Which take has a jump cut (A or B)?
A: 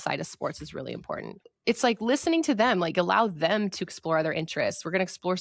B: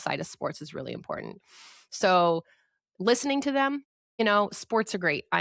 A